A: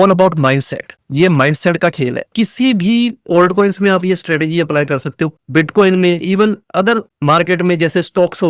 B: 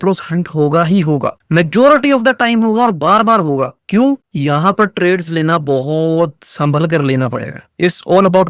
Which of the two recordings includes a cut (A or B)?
A